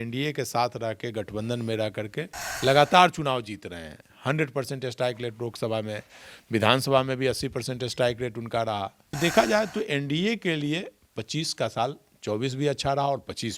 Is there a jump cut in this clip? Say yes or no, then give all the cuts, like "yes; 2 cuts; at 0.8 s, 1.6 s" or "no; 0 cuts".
yes; 1 cut; at 9.0 s